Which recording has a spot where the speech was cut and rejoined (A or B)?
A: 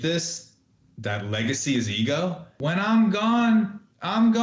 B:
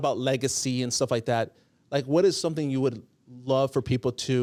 A